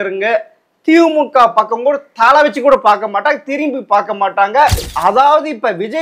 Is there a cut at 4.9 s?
yes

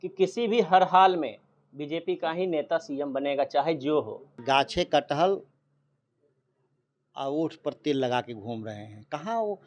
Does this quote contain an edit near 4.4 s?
yes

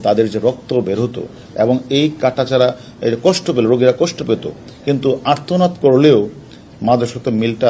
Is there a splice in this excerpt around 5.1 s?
no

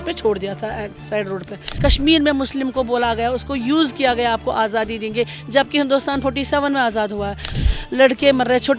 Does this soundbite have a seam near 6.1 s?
no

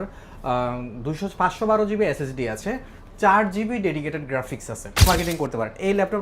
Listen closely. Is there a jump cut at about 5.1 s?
yes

